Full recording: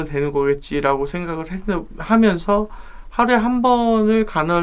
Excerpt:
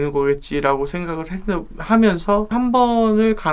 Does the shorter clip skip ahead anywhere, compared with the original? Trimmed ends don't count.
yes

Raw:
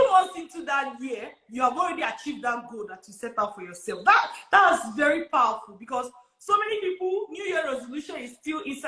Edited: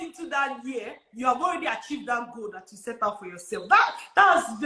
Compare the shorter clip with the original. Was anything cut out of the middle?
no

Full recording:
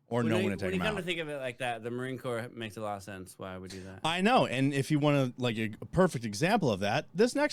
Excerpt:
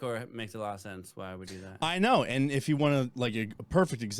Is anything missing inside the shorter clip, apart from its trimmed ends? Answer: no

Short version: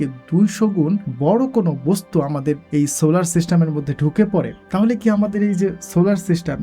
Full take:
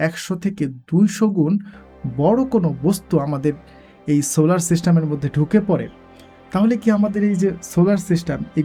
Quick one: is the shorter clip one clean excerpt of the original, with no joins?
no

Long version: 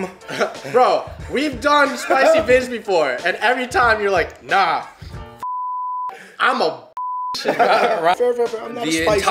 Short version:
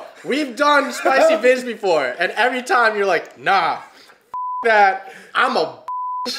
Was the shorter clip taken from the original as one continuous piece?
yes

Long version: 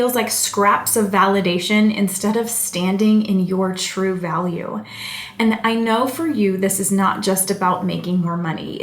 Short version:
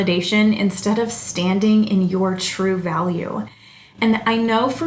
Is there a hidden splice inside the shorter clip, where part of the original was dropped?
no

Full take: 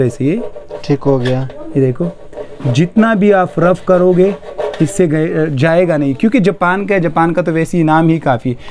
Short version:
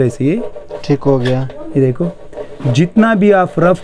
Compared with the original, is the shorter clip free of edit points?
yes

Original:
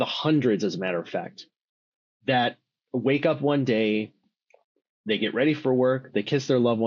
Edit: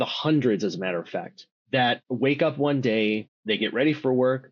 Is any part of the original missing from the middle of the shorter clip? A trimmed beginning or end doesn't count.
yes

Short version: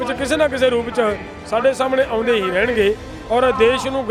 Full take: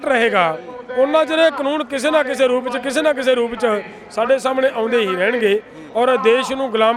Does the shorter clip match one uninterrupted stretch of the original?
yes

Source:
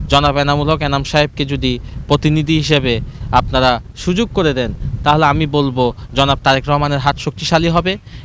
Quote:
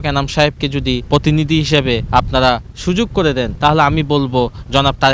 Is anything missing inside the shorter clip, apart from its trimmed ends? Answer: yes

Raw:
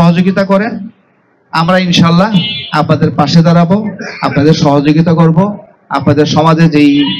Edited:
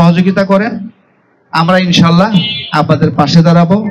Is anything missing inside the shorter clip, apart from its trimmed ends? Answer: no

